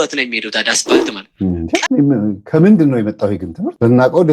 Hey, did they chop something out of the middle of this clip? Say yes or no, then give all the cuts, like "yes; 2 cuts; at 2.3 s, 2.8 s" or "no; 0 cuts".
yes; 1 cut; at 1.3 s